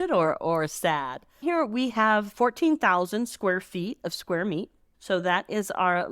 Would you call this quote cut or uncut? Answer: cut